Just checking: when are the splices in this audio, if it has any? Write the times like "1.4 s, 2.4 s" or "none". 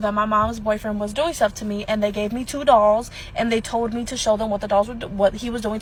none

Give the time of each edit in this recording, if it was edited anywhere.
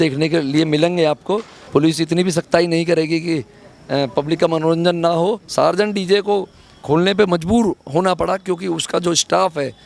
1.5 s, 5.4 s

